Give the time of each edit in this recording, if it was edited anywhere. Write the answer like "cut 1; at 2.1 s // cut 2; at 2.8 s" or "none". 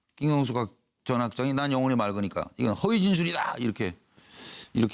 none